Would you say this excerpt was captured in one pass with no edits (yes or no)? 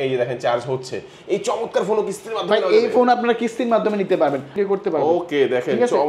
no